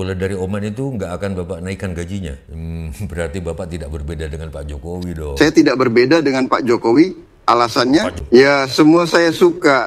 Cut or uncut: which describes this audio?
cut